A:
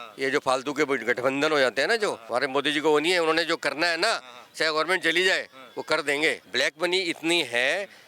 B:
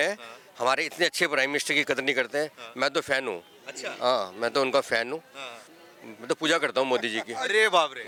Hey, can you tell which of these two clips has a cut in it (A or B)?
A